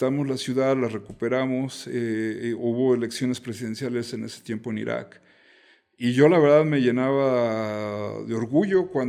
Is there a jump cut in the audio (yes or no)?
no